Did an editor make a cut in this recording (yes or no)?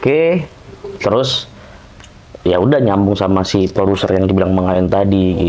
no